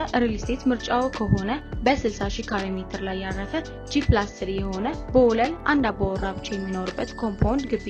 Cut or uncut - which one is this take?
uncut